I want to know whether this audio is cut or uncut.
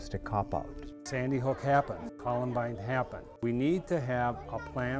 cut